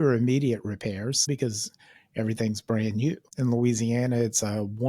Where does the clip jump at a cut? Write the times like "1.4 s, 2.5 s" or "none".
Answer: 1.3 s, 3.2 s